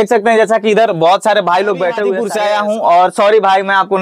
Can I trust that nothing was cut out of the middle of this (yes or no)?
no